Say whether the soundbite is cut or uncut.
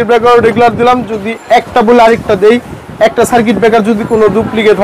uncut